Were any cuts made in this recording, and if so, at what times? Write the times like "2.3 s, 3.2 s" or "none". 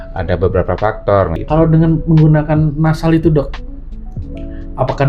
1.4 s